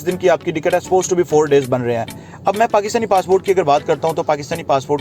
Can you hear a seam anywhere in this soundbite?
yes; 1 cut; at 2.2 s

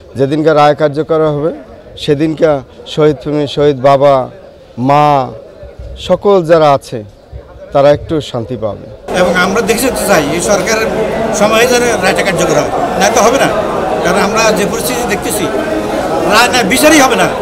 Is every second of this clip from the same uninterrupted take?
no; 1 cut; at 9.0 s

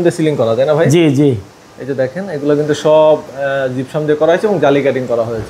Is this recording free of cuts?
yes; 0 cuts

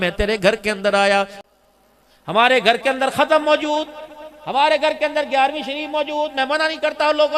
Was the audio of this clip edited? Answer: yes; 1 cut; at 1.4 s

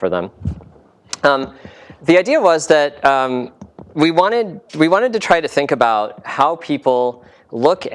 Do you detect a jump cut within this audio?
yes; 1 cut; at 3.0 s

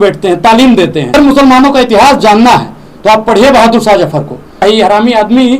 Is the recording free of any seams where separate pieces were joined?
no; 2 cuts; at 1.1 s, 4.6 s

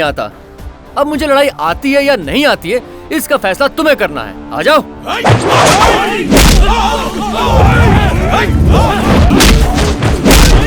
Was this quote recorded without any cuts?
no; 1 cut; at 9.3 s

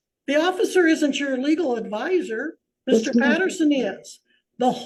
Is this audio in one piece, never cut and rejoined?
yes; 0 cuts

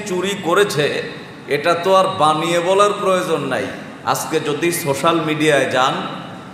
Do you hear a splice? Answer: no; 0 cuts

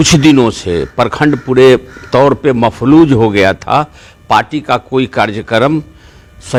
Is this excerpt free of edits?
yes; 0 cuts

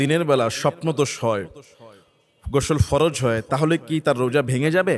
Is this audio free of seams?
yes; 0 cuts

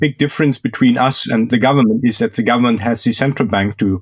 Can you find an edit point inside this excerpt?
yes; 1 cut; at 1.5 s

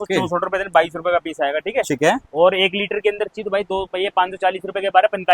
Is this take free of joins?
yes; 0 cuts

